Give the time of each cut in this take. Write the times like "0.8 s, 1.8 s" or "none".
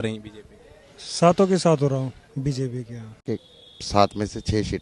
3.2 s